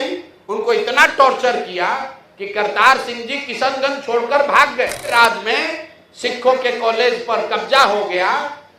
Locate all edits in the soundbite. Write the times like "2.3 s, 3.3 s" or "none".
5.1 s